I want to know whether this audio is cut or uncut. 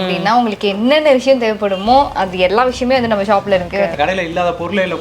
cut